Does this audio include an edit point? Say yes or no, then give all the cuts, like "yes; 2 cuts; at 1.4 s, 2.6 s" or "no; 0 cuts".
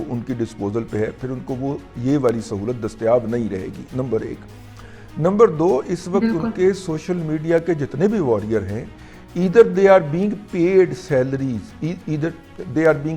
no; 0 cuts